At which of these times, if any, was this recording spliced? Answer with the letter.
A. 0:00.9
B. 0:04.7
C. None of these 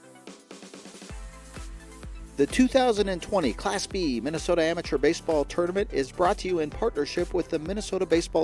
A